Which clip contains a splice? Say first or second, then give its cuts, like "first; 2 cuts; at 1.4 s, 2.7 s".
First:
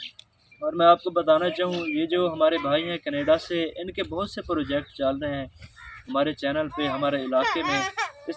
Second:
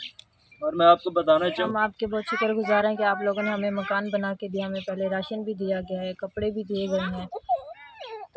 second; 1 cut; at 1.7 s